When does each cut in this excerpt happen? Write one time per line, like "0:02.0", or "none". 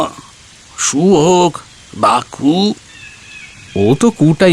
none